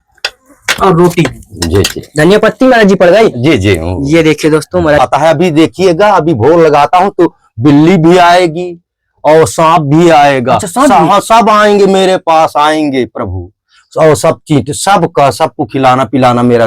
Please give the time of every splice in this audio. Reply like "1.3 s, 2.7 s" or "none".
5.0 s